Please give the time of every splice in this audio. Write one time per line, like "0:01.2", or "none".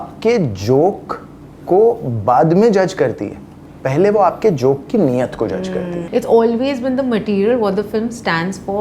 0:06.0